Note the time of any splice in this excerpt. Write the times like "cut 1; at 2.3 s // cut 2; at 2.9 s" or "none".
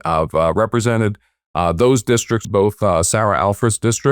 cut 1; at 2.4 s